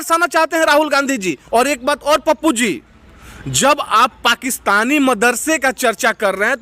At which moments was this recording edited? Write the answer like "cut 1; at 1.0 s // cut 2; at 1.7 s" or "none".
cut 1; at 1.4 s